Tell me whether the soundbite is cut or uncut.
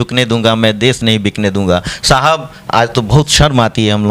uncut